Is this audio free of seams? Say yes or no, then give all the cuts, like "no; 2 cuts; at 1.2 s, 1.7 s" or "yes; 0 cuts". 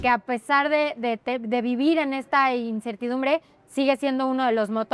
yes; 0 cuts